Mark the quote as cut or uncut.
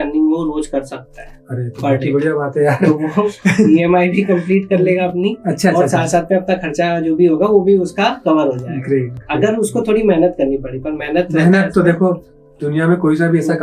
uncut